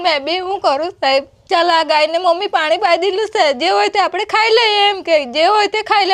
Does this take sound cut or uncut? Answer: cut